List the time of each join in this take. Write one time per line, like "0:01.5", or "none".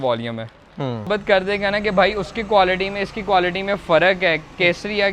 0:01.1